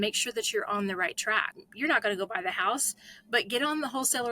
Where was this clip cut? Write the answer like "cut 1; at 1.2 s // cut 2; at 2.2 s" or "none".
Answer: cut 1; at 1.6 s